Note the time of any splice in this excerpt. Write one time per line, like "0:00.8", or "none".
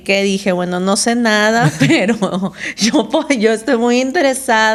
none